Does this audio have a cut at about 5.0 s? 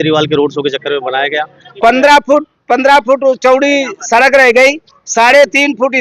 no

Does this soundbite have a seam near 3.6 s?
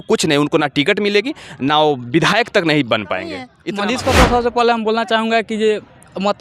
yes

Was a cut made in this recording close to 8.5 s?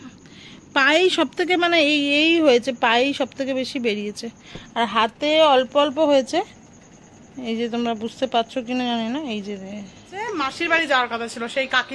no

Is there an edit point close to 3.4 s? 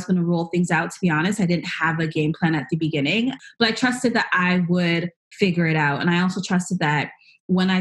yes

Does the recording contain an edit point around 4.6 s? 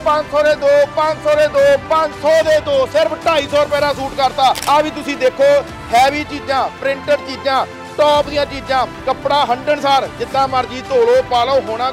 yes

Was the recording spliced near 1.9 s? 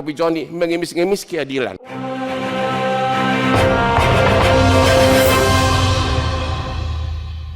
yes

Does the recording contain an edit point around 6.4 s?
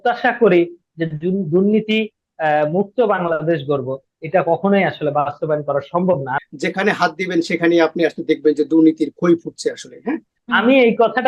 yes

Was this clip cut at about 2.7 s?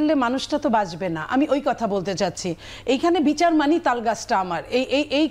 no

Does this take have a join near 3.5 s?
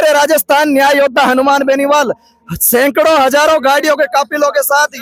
no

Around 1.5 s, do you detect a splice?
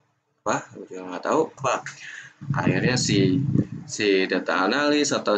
yes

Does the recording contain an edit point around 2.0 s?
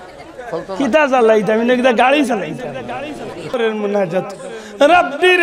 no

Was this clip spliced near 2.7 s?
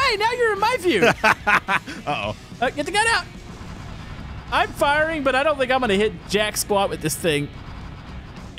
no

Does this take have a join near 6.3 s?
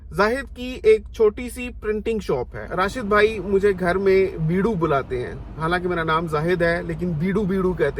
no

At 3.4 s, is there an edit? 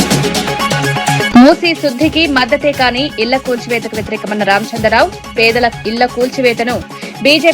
no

